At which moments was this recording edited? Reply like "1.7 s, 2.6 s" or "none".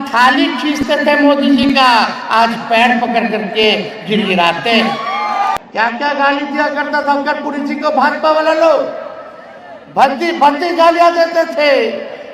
5.6 s